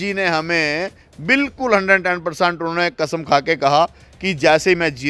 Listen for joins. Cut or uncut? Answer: uncut